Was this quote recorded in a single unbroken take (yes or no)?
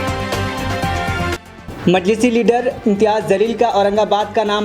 no